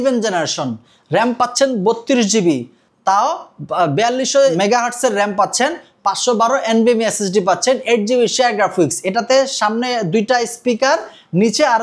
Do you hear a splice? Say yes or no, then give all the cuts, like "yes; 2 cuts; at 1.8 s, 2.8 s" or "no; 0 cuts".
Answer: yes; 1 cut; at 4.5 s